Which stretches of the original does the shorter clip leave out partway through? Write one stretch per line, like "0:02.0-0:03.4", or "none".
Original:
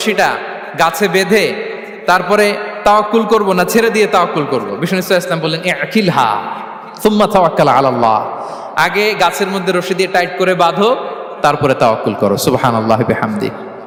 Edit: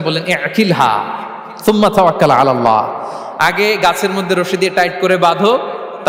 none